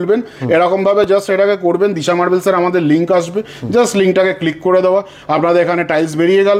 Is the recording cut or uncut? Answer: uncut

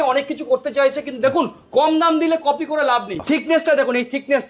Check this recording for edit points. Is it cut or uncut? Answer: cut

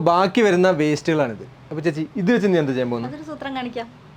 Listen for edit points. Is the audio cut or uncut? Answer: uncut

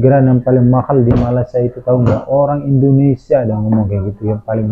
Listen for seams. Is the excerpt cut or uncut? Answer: uncut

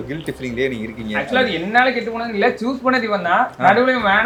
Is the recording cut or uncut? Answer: uncut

